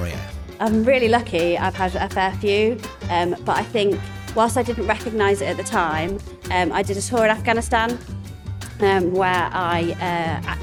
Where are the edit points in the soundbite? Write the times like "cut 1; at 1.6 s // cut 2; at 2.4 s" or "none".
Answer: none